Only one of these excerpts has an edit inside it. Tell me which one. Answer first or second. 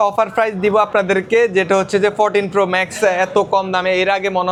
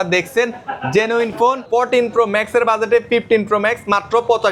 second